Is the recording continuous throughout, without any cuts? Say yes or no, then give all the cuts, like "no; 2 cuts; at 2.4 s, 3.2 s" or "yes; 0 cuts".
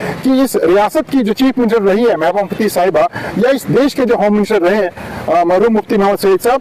yes; 0 cuts